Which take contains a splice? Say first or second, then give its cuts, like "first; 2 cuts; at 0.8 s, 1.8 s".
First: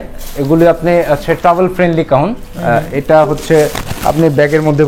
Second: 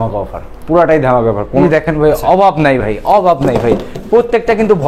second; 1 cut; at 1.6 s